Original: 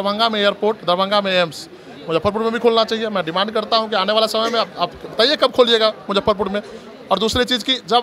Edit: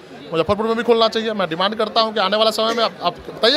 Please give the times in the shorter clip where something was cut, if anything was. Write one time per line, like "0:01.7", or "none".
none